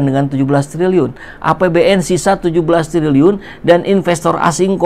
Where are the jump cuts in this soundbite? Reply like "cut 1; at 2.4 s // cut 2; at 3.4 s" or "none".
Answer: none